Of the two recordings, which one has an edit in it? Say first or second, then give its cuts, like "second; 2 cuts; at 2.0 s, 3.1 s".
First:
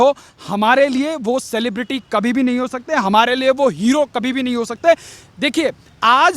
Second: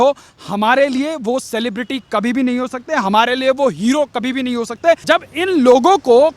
second; 1 cut; at 5.0 s